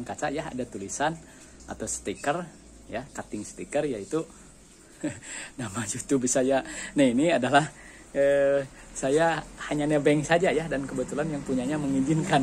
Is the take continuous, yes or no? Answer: yes